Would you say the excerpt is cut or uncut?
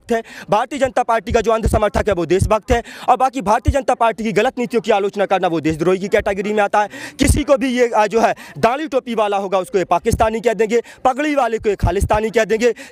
uncut